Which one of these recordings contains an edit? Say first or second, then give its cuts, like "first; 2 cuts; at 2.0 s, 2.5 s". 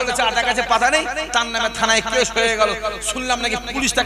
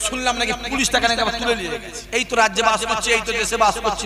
second; 1 cut; at 2.0 s